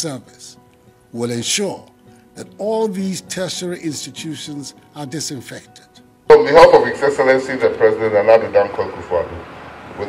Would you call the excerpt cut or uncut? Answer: uncut